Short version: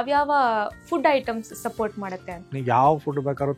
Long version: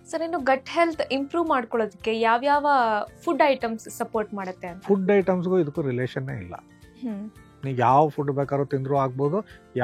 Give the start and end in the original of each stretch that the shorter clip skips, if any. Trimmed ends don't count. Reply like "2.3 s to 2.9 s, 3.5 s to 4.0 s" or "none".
4.7 s to 7.5 s

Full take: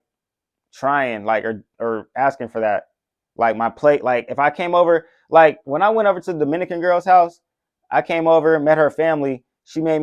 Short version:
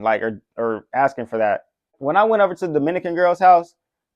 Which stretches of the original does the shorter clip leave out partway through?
3.2 s to 5.6 s

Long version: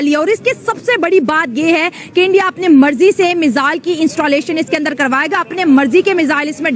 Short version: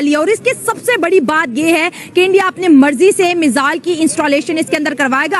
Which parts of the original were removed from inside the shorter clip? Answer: none

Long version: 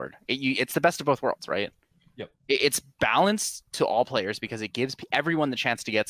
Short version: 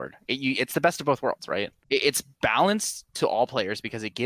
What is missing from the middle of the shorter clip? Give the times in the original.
1.8 s to 2.3 s

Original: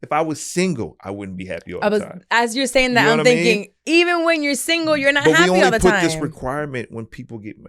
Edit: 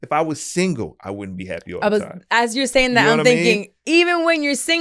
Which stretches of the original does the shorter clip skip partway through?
none

